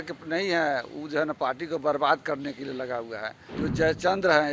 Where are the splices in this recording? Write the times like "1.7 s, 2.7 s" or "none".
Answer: 3.4 s

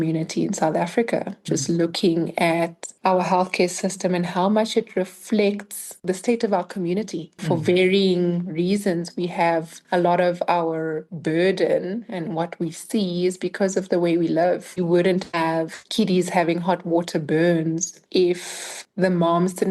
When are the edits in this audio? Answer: 14.7 s

